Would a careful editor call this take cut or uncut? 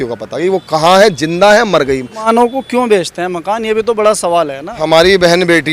cut